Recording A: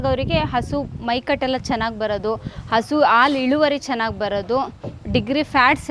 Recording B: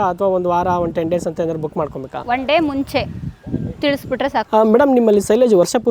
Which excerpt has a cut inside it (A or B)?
B